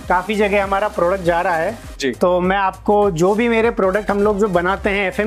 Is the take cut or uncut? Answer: uncut